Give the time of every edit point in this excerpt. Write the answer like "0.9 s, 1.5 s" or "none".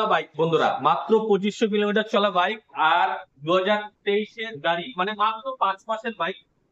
none